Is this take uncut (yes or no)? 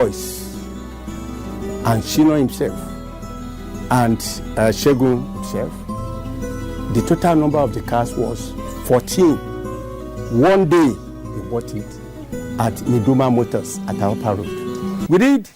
yes